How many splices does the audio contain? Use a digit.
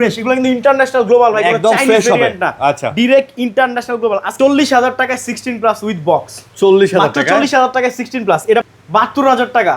2